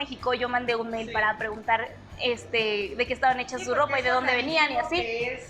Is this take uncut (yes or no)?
yes